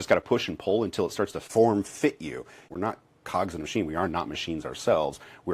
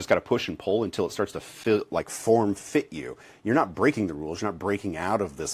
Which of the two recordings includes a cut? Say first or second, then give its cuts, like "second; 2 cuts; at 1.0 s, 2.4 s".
first; 2 cuts; at 1.4 s, 2.6 s